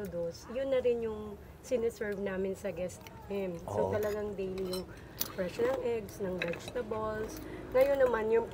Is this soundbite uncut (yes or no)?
yes